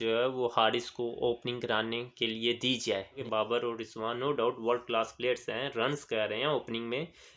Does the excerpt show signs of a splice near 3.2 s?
yes; 1 cut; at 3.2 s

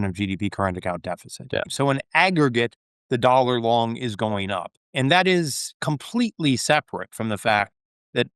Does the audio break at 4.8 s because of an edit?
yes; 2 cuts; at 1.6 s, 4.8 s

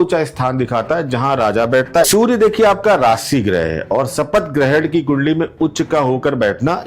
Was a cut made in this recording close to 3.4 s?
no; 1 cut; at 2.1 s

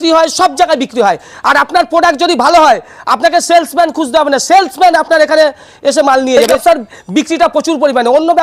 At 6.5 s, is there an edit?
yes; 1 cut; at 6.5 s

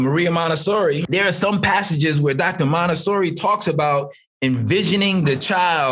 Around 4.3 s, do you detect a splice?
no; 1 cut; at 1.0 s

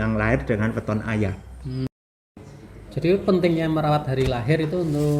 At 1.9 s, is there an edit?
yes; 1 cut; at 1.9 s

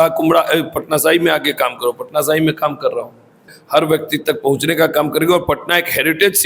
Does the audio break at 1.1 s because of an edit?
no; 1 cut; at 3.5 s

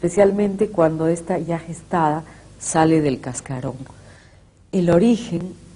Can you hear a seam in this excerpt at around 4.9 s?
no; 1 cut; at 1.0 s

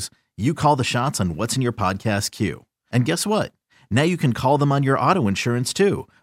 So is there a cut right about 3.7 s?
no; 0 cuts

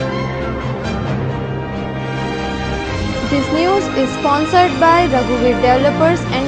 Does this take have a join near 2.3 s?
no; 0 cuts

